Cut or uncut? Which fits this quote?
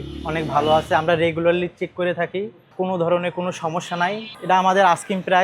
uncut